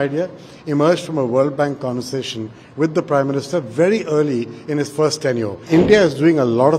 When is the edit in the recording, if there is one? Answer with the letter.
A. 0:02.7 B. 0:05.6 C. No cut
B